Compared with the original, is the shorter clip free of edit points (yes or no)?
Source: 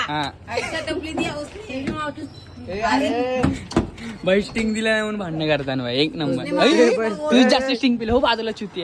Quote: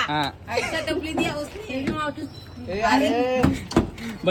yes